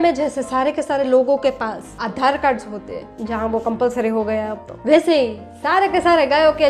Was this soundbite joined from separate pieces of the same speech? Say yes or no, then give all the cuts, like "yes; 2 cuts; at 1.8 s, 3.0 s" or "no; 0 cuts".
no; 0 cuts